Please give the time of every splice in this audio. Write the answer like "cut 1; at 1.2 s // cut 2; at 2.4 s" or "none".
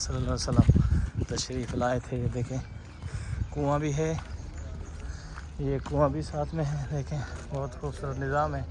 none